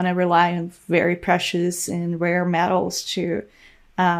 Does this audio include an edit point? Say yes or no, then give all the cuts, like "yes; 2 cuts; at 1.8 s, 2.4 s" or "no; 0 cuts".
no; 0 cuts